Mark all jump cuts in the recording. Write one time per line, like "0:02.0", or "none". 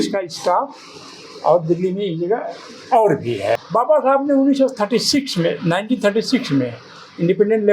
0:03.6